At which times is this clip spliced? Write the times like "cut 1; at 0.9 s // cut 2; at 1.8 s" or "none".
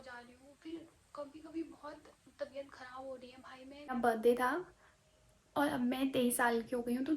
cut 1; at 3.9 s

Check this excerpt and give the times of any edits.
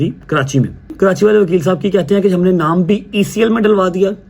cut 1; at 0.9 s

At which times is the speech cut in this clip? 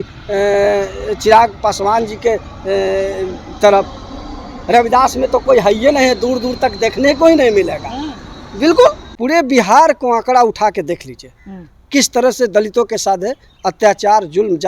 cut 1; at 9.1 s

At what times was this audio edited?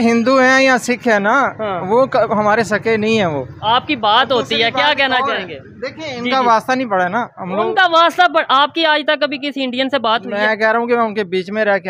none

